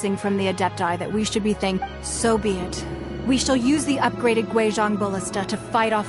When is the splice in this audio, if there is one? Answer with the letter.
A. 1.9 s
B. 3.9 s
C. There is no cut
A